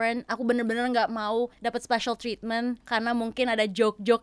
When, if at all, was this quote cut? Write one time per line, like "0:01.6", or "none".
0:01.5
0:02.8

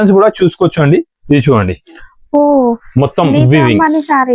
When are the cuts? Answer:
none

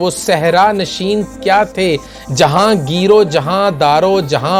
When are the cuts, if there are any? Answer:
none

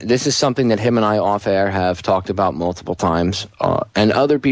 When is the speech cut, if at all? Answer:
0:01.2

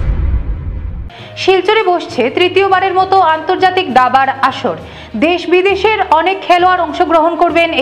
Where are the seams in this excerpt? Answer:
0:00.9

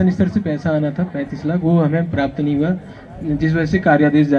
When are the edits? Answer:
none

